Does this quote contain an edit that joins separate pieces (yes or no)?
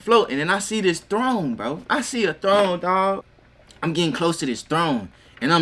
yes